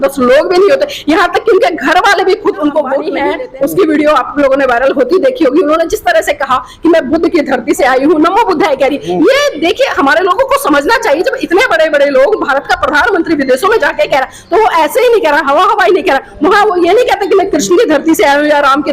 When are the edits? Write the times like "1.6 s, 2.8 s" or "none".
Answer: 3.1 s